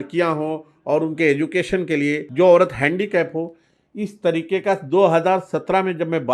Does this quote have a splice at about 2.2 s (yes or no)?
yes